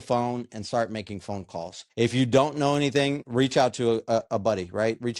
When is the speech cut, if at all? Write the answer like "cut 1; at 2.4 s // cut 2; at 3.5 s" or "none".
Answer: cut 1; at 1.8 s // cut 2; at 3.2 s